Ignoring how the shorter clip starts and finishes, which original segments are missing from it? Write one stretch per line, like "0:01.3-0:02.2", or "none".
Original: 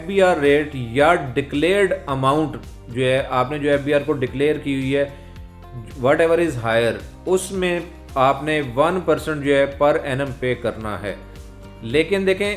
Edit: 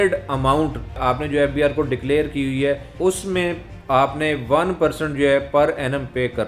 0:02.8-0:03.3
0:05.2-0:07.1